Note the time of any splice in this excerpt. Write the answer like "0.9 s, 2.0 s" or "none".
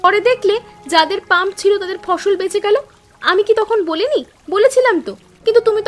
none